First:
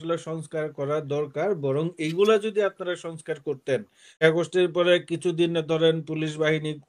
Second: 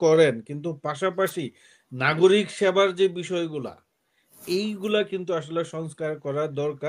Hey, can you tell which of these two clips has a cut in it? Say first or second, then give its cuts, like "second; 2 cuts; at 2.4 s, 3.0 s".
first; 1 cut; at 4.2 s